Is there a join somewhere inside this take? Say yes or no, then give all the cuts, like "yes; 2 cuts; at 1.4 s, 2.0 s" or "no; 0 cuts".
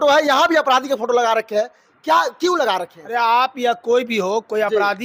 no; 0 cuts